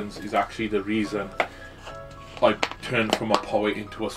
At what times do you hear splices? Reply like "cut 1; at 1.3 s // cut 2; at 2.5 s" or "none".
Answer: none